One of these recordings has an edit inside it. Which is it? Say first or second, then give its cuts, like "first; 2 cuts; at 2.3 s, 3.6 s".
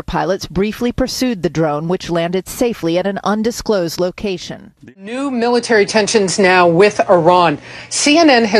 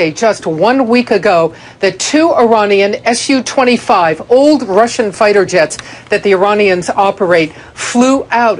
first; 1 cut; at 4.8 s